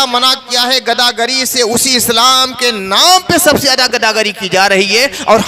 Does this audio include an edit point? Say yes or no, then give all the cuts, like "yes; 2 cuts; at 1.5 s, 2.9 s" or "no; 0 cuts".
no; 0 cuts